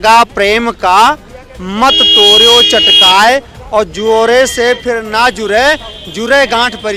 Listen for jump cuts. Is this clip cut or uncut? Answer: uncut